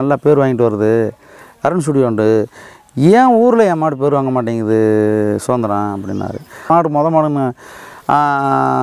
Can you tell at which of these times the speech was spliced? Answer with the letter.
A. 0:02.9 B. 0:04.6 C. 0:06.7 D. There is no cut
C